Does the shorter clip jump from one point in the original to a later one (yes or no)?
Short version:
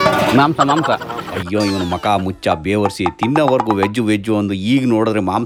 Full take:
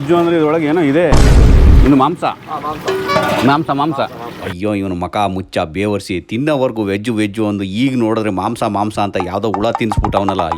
no